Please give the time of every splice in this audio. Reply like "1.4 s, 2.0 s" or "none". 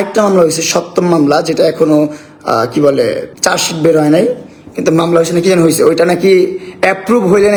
none